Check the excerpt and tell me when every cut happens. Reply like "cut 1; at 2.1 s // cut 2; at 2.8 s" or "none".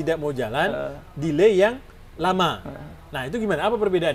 none